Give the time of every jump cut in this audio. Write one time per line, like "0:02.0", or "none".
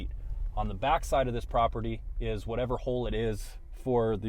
none

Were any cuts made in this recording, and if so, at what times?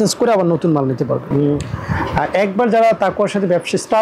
0:01.3

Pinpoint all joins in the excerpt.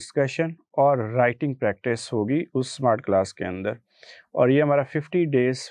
none

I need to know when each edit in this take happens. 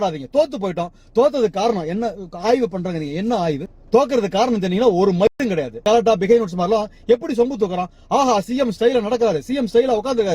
0:03.7
0:05.3

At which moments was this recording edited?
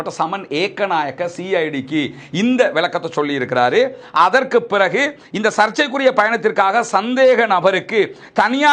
none

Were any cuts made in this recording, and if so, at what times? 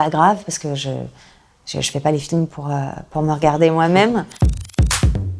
0:04.4

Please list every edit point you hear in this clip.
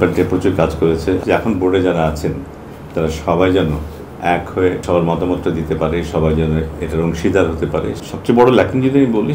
0:01.2
0:04.8
0:08.0

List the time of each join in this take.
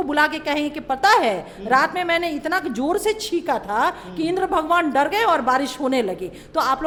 none

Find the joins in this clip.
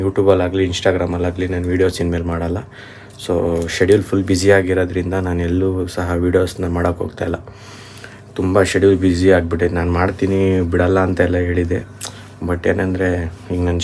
none

